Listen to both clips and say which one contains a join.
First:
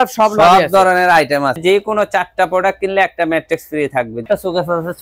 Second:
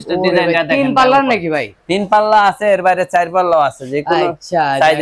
first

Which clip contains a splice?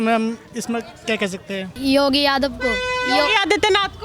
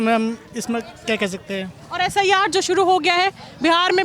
first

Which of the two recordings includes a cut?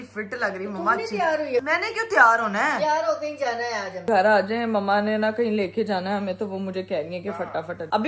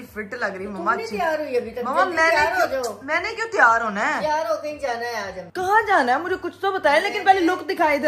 first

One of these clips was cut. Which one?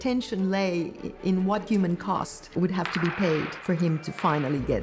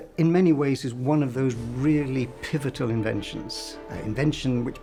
first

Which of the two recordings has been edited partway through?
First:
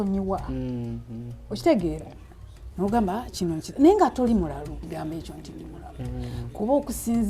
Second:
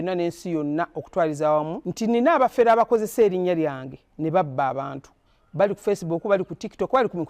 first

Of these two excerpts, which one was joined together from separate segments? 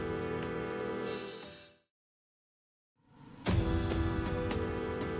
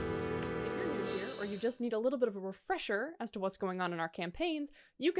second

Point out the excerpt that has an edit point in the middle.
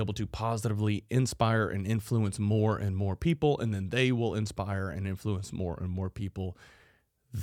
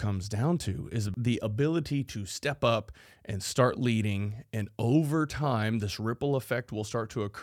second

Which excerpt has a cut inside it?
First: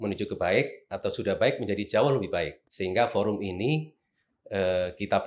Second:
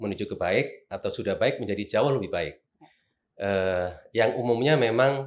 first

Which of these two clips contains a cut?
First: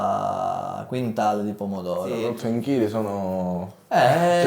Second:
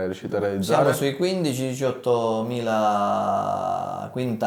first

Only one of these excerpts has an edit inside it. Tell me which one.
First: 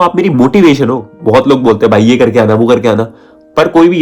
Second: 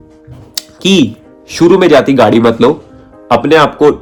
first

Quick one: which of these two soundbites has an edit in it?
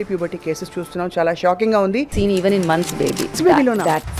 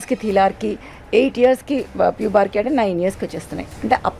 first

